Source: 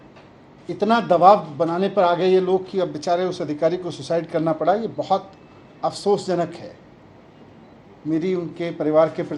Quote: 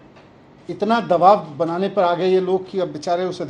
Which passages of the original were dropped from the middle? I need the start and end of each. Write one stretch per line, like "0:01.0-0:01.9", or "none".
none

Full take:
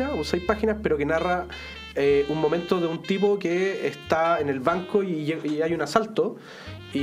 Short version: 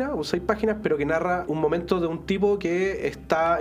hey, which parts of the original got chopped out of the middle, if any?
0:01.5-0:02.3

